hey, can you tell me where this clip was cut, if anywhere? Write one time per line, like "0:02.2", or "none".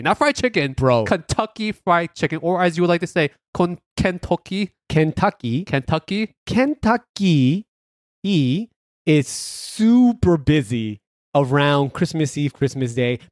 none